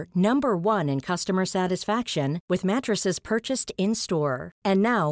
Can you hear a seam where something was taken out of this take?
no; 0 cuts

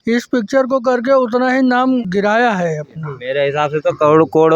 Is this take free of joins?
no; 2 cuts; at 2.1 s, 3.1 s

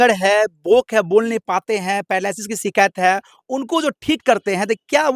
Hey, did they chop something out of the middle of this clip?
no; 0 cuts

